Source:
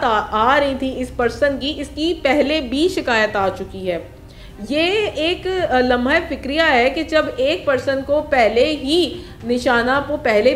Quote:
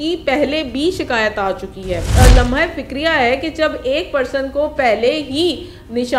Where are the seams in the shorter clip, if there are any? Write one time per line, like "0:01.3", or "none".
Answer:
0:02.1